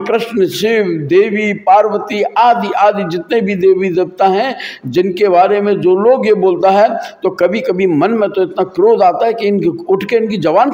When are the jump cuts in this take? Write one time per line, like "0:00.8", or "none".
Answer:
none